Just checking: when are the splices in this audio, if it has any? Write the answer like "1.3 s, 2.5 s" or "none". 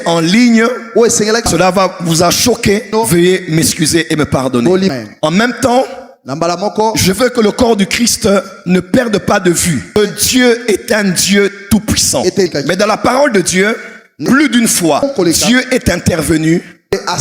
1.5 s, 2.9 s, 4.9 s, 9.9 s, 12.5 s